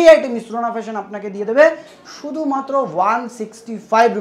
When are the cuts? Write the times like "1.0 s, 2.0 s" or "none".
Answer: none

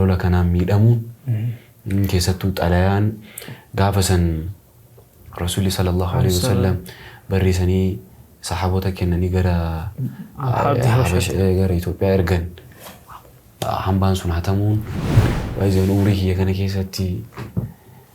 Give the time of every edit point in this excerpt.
15.2 s

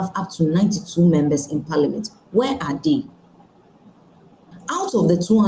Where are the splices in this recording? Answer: 4.5 s

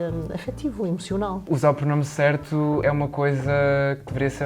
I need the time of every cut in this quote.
1.5 s, 2.8 s

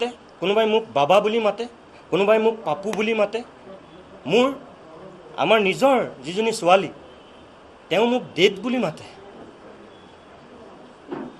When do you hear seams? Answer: none

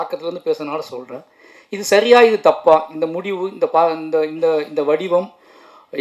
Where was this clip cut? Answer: none

